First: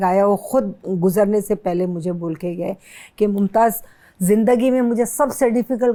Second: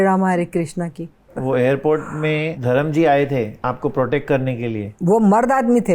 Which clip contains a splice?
second; 4 cuts; at 1.4 s, 2.5 s, 3.5 s, 4.8 s

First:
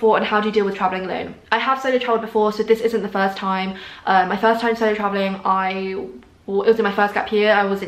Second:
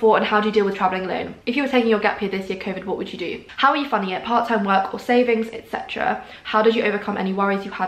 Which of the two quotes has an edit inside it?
second; 2 cuts; at 1.3 s, 3.5 s

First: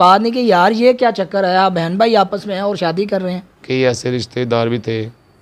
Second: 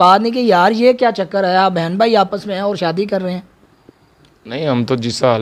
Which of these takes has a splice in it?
first; 1 cut; at 3.5 s

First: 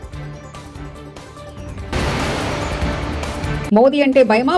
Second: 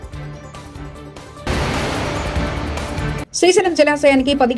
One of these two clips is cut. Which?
first; 1 cut; at 1.4 s

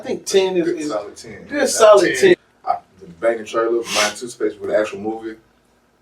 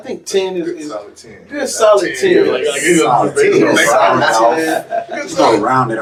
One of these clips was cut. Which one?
first; 1 cut; at 2.3 s

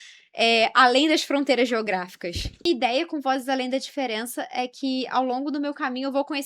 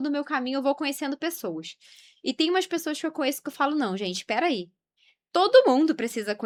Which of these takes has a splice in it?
first; 1 cut; at 2.6 s

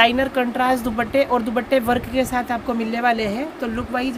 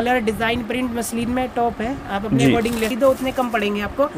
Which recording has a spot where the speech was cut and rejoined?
second; 1 cut; at 2.9 s

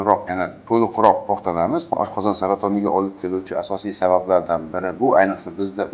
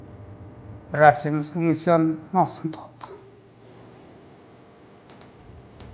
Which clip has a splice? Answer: first; 1 cut; at 1.9 s

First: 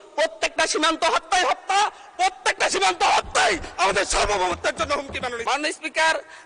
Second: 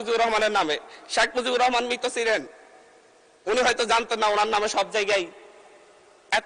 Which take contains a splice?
first; 1 cut; at 5.4 s

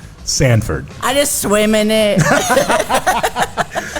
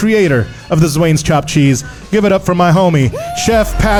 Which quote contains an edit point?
first; 1 cut; at 0.9 s

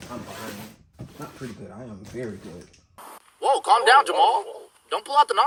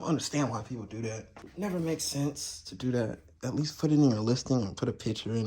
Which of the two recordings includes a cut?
second; 1 cut; at 1.4 s

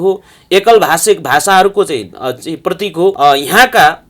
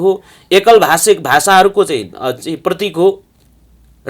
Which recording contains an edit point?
first; 1 cut; at 3.2 s

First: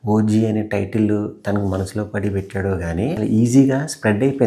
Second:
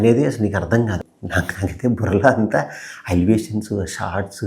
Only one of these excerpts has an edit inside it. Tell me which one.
first; 1 cut; at 3.2 s

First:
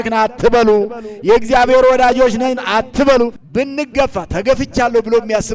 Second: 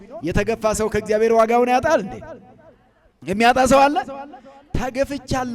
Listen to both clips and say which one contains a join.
first; 1 cut; at 3.4 s

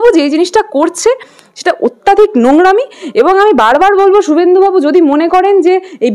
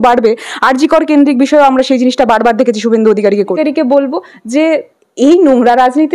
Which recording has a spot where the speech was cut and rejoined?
second; 1 cut; at 3.6 s

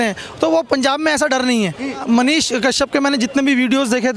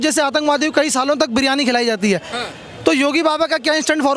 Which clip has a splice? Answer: first; 1 cut; at 2.0 s

